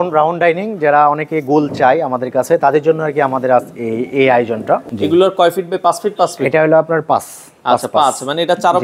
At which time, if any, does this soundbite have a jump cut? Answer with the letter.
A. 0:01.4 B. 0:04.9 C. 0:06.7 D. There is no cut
B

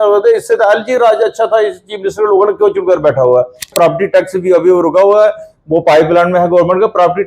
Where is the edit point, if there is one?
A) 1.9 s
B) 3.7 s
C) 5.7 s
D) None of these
B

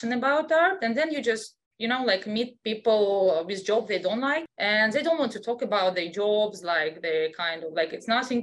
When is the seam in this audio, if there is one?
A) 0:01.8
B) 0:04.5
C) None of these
B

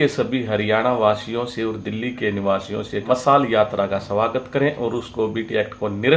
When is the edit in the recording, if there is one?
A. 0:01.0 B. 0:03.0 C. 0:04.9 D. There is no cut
B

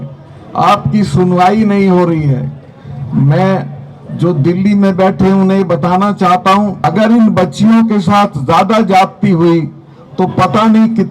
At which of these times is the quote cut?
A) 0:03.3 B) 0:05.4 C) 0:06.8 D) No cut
C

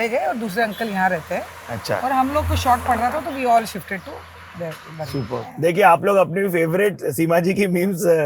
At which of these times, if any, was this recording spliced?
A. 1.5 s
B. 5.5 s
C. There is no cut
B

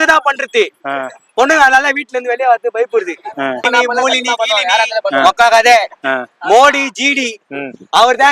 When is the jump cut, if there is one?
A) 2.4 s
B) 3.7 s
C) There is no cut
B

